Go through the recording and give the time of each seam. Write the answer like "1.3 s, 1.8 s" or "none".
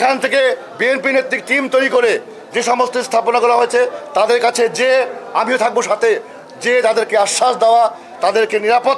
none

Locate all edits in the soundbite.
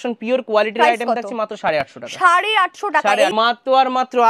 3.3 s

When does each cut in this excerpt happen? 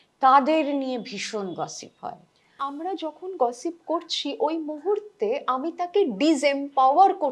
2.6 s

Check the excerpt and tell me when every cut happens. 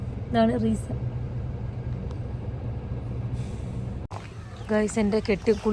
4.1 s

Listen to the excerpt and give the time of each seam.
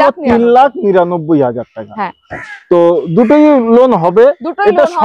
none

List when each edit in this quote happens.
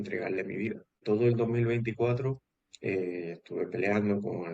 1.0 s

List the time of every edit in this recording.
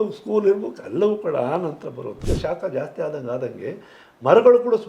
2.2 s

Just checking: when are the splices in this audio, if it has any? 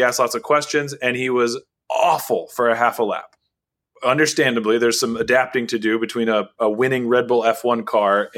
1.7 s, 3.8 s

